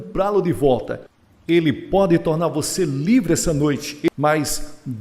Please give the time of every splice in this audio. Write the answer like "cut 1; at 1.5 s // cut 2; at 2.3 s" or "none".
cut 1; at 4.1 s